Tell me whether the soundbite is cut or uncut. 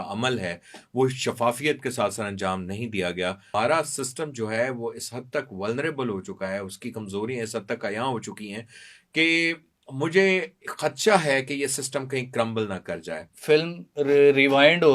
cut